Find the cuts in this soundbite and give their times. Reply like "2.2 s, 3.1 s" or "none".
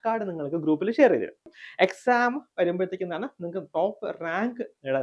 1.5 s